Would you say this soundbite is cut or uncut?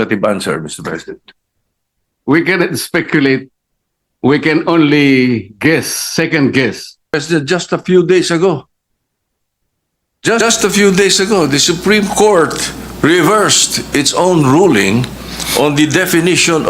cut